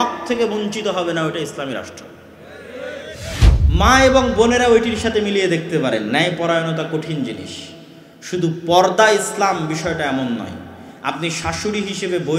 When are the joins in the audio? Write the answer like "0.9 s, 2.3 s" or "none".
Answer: 3.5 s